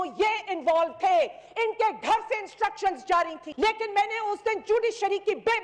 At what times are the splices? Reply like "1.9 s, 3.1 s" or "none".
3.4 s

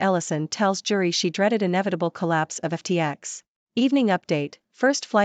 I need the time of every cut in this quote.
3.7 s

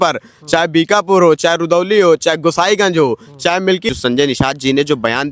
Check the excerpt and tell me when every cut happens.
3.9 s

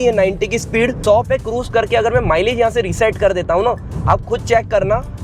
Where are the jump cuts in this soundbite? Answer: 1.0 s

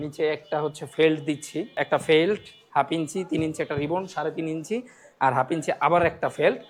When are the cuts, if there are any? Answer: 1.8 s

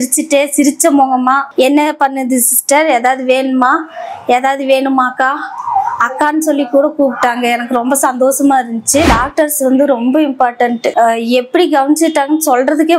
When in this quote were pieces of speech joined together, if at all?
1.5 s, 9.1 s

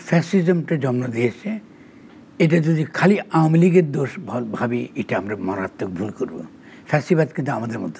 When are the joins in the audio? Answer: none

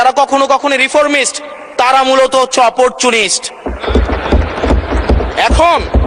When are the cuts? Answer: none

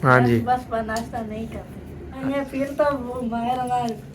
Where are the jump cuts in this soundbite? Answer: 2.2 s

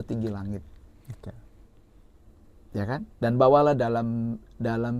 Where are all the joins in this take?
none

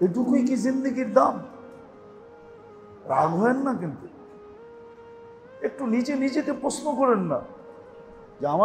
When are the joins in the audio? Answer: 4.2 s, 5.6 s

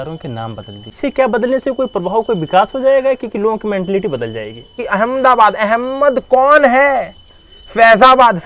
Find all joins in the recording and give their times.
1.0 s, 4.8 s

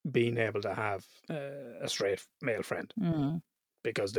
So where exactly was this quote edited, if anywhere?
1.1 s

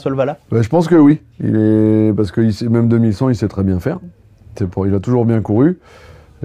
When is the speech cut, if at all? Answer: none

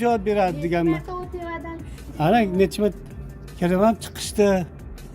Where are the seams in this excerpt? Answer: none

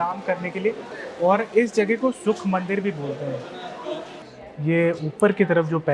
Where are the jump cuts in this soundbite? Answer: 4.2 s

